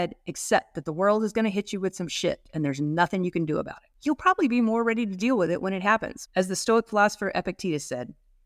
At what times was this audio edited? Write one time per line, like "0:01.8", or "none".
0:03.8
0:06.2